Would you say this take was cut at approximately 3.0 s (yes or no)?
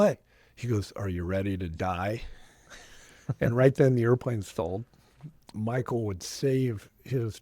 no